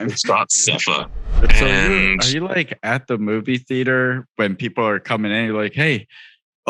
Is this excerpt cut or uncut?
cut